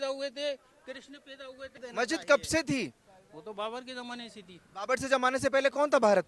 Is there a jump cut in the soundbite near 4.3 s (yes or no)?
no